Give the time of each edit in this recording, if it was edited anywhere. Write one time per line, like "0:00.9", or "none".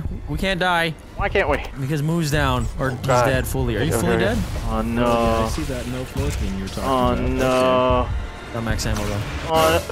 0:01.0
0:04.5